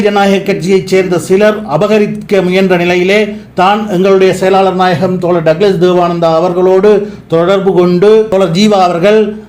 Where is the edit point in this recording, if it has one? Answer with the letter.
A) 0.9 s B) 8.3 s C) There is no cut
B